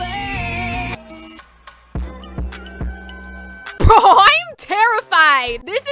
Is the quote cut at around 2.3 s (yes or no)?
no